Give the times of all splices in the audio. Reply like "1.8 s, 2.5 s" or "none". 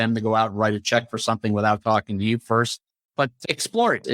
3.1 s